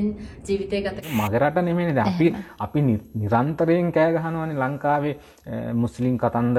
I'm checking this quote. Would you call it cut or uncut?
cut